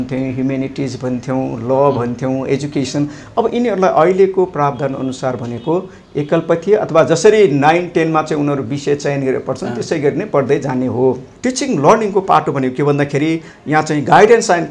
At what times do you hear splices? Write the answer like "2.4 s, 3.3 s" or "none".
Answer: 11.4 s